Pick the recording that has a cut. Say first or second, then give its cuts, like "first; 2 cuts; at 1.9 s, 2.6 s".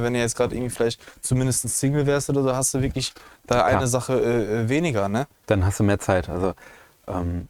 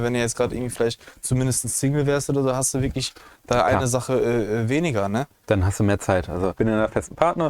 second; 1 cut; at 6.5 s